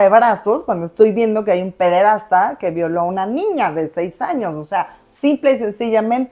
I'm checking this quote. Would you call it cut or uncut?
uncut